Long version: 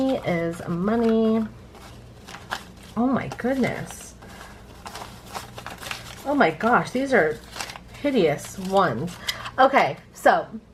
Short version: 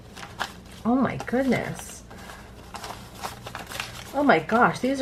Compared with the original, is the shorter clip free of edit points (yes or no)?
yes